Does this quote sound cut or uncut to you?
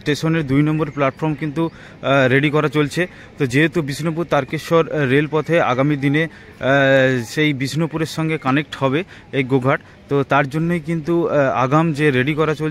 uncut